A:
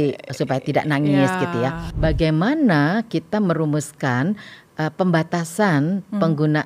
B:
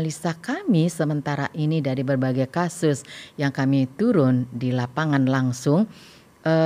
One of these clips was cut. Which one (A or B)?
A